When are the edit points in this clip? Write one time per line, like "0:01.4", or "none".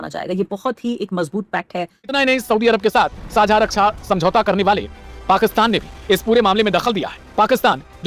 0:02.1